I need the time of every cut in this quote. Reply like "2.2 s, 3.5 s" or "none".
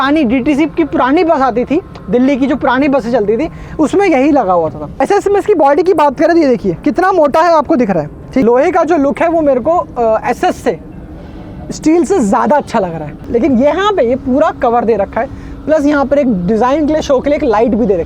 5.0 s, 8.4 s, 13.2 s